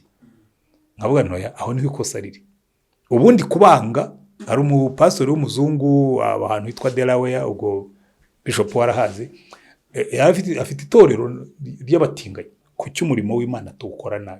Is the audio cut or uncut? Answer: cut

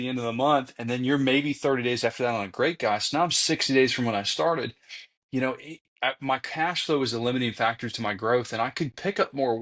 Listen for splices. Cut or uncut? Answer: uncut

